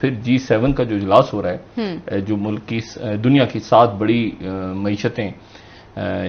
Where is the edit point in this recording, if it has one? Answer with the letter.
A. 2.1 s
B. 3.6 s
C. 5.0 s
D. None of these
D